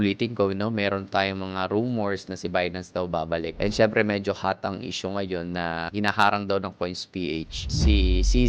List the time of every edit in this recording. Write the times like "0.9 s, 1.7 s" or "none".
5.9 s